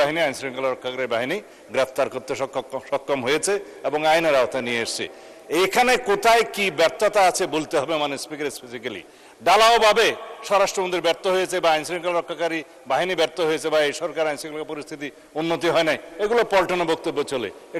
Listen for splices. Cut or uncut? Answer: uncut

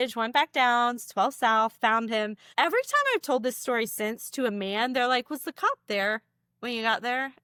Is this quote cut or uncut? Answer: uncut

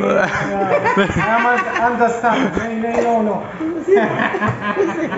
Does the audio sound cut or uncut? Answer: uncut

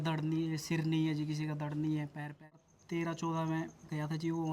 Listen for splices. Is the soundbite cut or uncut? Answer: cut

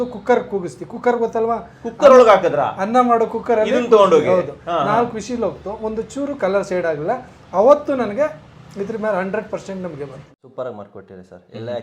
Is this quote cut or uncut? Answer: cut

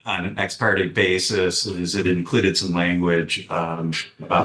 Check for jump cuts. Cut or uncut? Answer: uncut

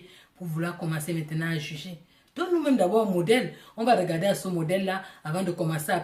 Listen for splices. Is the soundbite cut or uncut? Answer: uncut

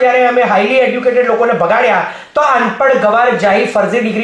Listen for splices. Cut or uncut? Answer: uncut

